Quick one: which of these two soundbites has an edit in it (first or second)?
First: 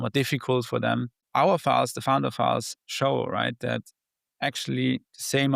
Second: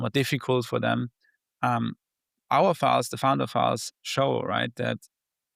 first